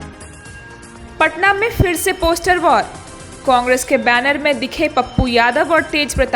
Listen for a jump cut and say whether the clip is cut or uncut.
uncut